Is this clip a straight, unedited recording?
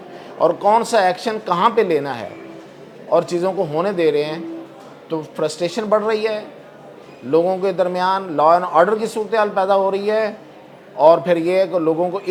yes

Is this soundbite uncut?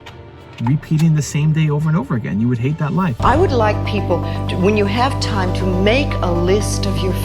no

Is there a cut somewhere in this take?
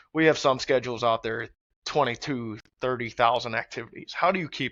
no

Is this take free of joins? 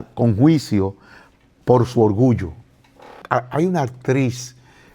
no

